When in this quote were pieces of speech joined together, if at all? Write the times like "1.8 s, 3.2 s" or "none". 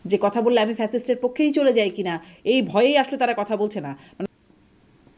4.1 s